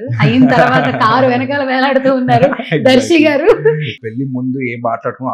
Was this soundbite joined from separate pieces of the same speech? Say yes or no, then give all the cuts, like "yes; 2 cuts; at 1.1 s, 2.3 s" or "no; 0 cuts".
yes; 1 cut; at 3.9 s